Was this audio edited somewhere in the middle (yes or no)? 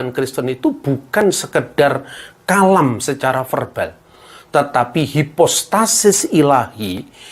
no